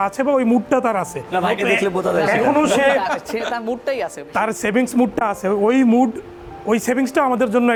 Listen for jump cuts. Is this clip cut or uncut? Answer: uncut